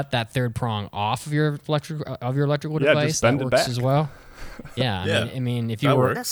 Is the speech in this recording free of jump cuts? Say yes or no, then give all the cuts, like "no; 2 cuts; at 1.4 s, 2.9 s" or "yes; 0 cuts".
yes; 0 cuts